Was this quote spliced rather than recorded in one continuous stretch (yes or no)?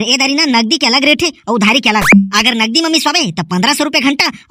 no